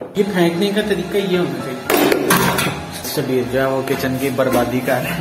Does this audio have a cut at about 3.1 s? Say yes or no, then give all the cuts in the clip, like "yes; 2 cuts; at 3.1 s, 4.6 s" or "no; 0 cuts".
yes; 1 cut; at 3.1 s